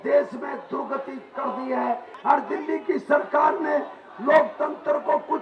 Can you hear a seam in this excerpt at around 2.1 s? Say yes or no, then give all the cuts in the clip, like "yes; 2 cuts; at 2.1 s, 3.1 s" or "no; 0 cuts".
yes; 1 cut; at 2.1 s